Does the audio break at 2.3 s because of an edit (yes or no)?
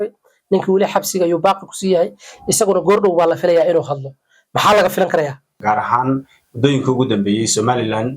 no